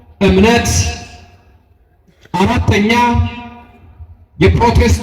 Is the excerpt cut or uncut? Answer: uncut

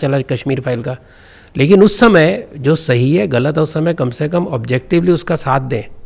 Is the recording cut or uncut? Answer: uncut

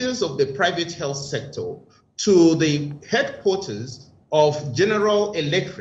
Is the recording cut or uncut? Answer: uncut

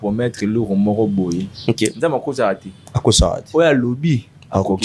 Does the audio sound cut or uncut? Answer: uncut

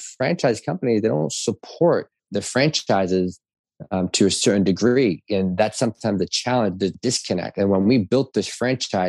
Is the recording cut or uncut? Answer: cut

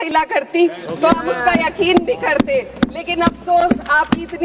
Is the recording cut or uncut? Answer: uncut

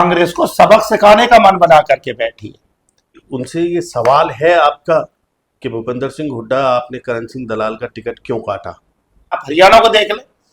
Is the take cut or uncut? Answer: cut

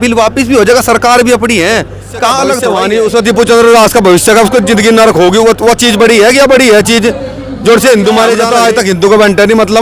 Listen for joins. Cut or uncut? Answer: cut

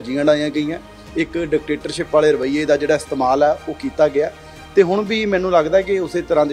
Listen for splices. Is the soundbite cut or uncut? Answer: uncut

